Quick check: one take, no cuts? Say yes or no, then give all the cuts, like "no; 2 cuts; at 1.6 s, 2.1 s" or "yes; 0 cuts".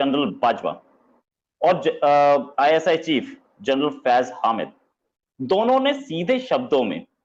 yes; 0 cuts